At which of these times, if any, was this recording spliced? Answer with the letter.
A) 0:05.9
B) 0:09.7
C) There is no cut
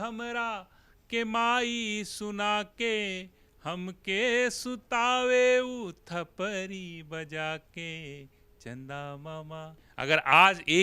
B